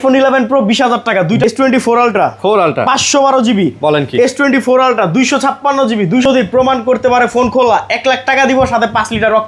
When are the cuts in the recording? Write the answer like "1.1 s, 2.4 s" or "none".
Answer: 1.4 s, 6.2 s